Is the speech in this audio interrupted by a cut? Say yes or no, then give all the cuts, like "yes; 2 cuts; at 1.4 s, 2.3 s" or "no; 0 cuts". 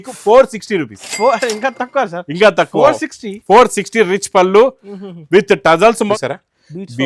yes; 1 cut; at 6.2 s